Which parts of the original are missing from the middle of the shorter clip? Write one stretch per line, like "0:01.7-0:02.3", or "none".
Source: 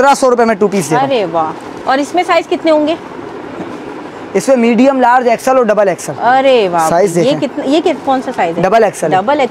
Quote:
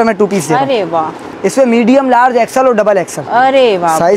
0:01.7-0:04.1